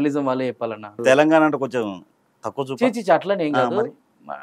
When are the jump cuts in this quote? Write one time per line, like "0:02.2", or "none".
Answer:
0:01.0